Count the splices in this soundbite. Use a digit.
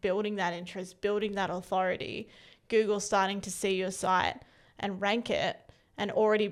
0